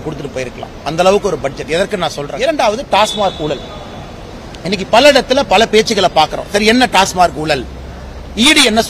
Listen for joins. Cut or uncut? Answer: cut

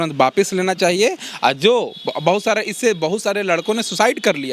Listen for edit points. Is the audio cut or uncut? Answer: uncut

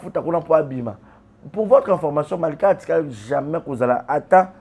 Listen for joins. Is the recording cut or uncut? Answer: uncut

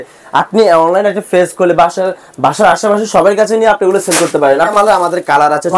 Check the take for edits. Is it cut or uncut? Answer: cut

